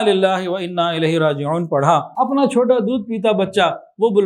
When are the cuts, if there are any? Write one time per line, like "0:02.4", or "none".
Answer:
0:02.1